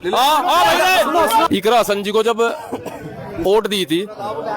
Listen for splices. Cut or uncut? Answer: cut